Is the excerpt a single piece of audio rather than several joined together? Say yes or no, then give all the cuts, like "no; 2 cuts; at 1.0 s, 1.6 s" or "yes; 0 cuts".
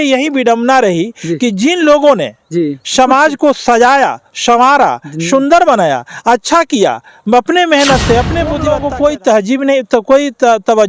no; 1 cut; at 8.6 s